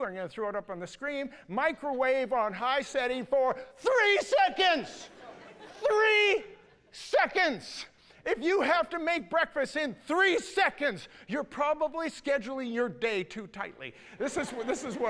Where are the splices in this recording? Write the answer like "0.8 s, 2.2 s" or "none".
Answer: none